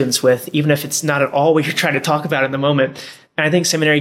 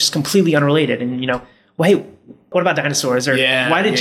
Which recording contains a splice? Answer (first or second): second